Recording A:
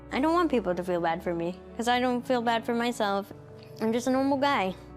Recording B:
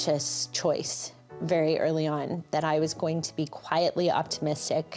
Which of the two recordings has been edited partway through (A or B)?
A